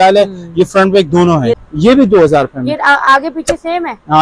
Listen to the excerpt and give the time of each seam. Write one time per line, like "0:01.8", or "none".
0:01.6